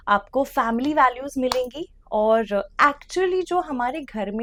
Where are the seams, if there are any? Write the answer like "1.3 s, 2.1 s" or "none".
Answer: none

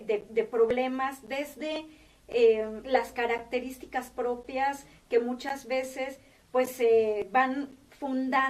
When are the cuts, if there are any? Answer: 7.6 s

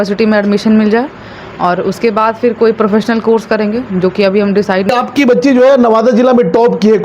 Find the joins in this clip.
4.9 s

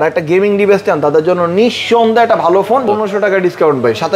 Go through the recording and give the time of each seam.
2.8 s

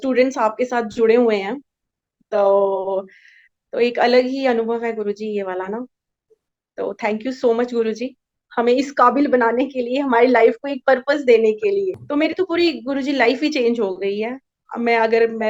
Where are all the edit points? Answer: 11.9 s

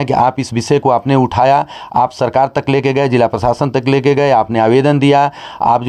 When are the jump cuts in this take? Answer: none

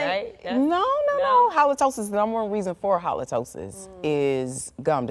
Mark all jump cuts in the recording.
none

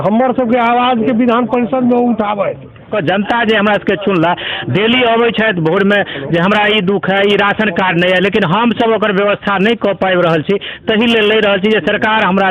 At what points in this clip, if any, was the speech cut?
2.9 s

